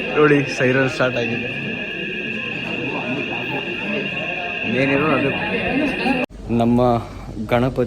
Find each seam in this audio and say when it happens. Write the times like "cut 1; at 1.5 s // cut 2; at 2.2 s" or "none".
cut 1; at 6.3 s